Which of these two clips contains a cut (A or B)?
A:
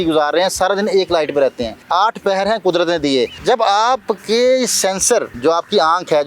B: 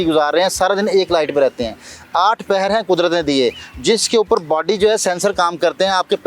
A